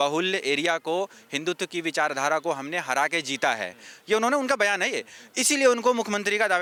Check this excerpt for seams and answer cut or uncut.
uncut